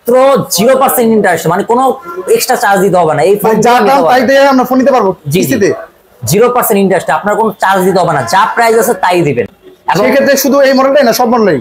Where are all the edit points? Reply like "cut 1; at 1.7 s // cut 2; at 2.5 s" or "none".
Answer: none